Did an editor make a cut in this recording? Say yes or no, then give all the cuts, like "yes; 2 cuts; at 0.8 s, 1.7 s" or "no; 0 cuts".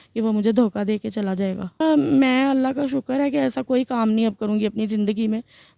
yes; 1 cut; at 1.7 s